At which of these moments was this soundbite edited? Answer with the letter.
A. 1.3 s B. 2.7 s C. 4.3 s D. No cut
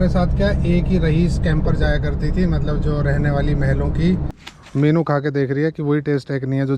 C